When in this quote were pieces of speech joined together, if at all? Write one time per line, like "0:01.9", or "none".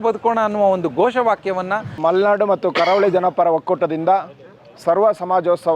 0:01.8